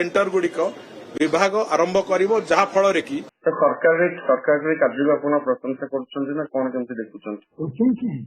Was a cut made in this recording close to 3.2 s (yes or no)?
yes